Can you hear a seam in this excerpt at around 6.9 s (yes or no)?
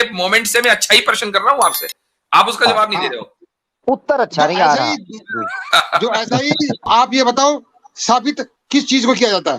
yes